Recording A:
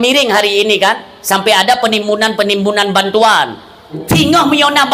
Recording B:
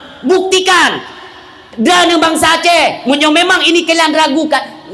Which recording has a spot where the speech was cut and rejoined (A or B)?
A